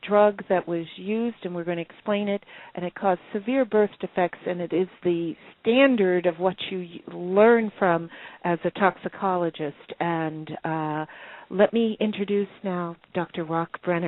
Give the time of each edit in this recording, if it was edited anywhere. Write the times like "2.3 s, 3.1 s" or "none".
12.1 s